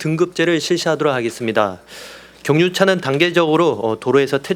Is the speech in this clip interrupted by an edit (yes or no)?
no